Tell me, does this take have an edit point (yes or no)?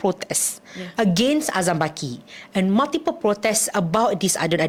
no